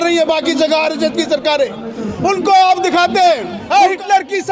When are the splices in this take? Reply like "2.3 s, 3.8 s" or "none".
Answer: 3.5 s